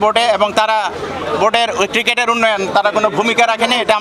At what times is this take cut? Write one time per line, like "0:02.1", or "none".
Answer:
none